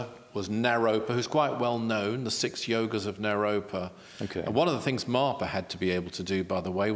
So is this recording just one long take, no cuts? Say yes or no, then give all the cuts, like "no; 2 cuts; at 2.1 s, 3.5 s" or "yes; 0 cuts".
yes; 0 cuts